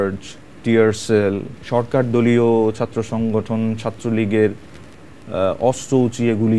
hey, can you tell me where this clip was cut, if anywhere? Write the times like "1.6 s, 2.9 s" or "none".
1.5 s